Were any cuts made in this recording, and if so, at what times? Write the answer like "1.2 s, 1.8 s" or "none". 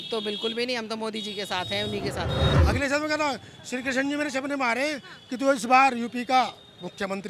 2.5 s

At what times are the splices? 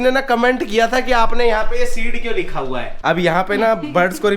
2.9 s

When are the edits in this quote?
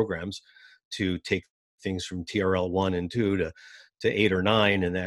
none

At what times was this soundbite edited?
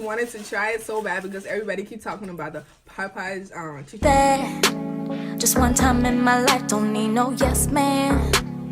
4.0 s

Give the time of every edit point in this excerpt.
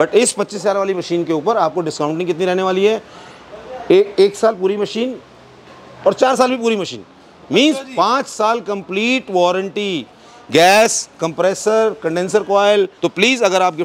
12.9 s

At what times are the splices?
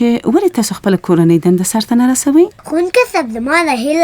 2.6 s

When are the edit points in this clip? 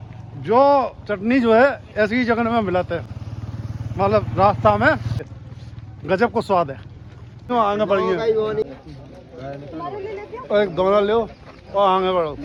none

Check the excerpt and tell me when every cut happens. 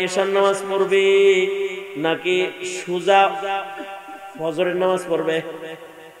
none

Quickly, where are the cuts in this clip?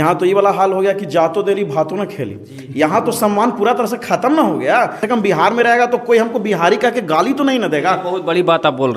5.0 s

